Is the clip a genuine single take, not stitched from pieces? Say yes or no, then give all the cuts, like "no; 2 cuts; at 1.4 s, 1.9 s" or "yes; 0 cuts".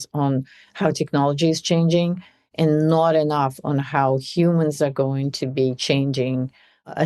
yes; 0 cuts